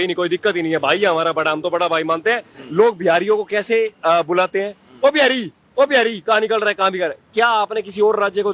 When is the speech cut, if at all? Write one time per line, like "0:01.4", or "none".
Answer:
0:02.6

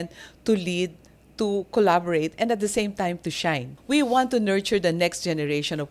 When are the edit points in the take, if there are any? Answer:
0:03.7

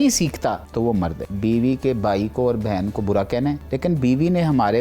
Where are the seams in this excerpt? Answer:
0:01.1
0:03.7

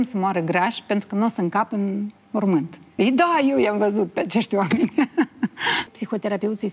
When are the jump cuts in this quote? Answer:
0:02.8
0:05.9

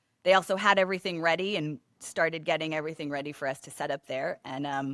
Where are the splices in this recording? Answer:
none

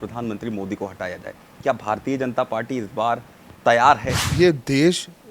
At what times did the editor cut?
0:04.3

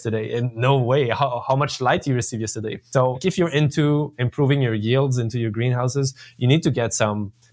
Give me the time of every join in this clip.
0:03.2

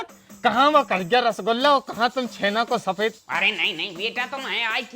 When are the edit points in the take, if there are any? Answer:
0:03.2

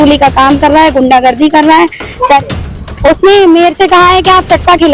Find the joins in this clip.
0:02.4

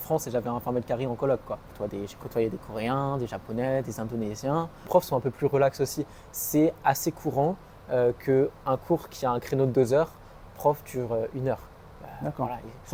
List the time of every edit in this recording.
0:01.7
0:04.9

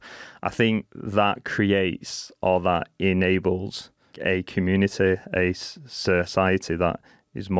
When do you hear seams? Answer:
0:01.0
0:04.1

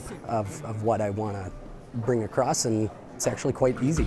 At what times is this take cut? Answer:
0:03.0

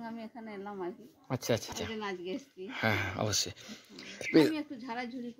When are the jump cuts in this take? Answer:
0:01.8

